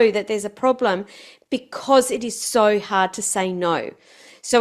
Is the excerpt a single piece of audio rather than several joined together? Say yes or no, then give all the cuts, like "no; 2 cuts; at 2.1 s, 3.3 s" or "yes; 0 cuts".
yes; 0 cuts